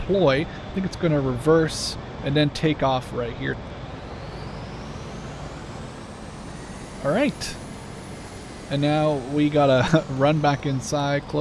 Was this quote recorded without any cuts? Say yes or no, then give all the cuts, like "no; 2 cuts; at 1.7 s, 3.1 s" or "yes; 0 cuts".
no; 1 cut; at 3.6 s